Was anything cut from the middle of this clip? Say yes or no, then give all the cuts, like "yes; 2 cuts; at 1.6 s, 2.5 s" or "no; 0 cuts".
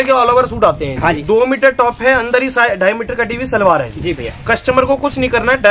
yes; 1 cut; at 1.2 s